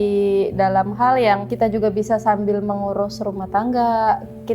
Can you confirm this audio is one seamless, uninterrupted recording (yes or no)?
no